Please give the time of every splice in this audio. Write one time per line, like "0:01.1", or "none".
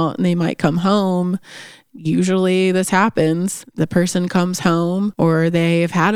0:03.6
0:05.1

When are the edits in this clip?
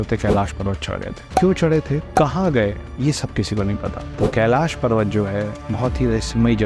none

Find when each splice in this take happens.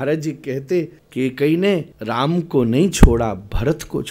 0:01.0
0:01.9

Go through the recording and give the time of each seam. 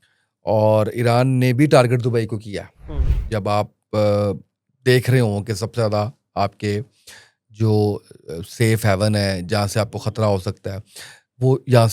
none

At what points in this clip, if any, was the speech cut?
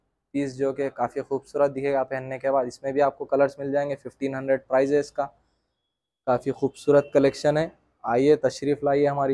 none

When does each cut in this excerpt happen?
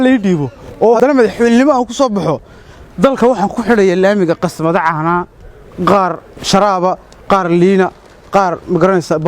0:01.0

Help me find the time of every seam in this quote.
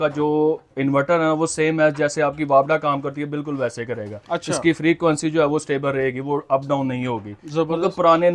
none

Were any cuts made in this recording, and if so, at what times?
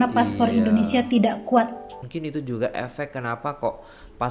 0:02.0

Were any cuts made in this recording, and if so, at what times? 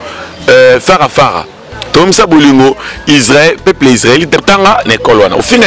0:04.4

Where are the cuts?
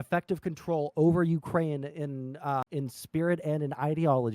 0:02.6

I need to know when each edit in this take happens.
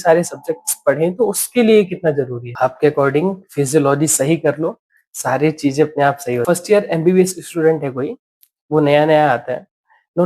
0:02.4
0:06.4

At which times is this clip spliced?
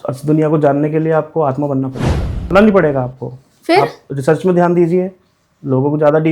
0:02.5

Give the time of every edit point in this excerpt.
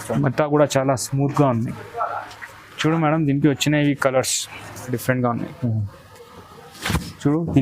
0:05.0

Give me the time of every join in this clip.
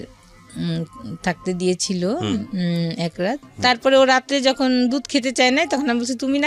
0:03.5

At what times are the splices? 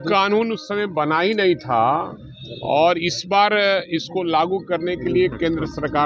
none

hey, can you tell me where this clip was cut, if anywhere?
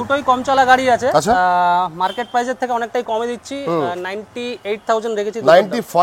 none

